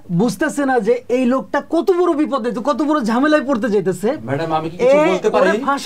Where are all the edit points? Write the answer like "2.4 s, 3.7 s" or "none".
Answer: none

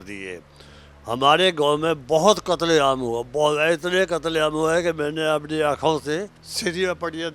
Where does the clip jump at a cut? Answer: 6.4 s

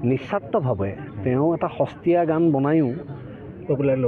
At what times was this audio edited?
none

